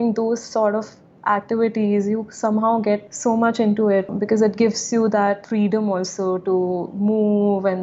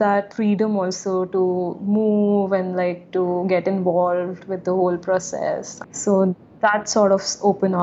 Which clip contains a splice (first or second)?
first